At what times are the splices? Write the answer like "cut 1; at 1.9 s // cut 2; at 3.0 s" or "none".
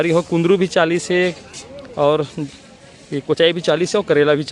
none